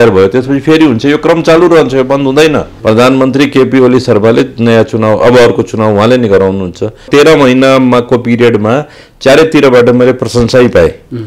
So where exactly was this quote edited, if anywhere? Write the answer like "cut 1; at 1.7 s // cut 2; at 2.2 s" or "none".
cut 1; at 2.7 s // cut 2; at 7.1 s